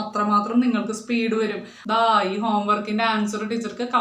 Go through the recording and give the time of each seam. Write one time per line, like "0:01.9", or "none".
0:01.7